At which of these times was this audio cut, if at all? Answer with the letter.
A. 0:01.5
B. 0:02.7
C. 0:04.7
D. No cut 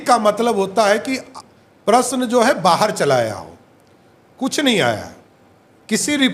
D